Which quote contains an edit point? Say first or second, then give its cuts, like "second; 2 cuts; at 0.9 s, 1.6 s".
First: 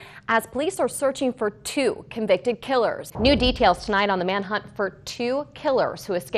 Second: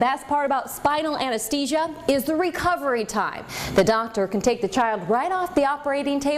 first; 1 cut; at 3.1 s